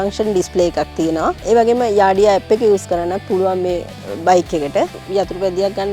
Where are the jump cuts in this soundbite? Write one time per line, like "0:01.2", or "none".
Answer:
0:05.0